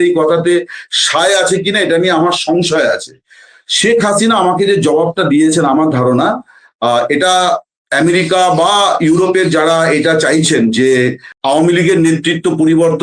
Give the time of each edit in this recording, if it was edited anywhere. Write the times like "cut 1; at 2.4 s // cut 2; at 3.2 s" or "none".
cut 1; at 11.3 s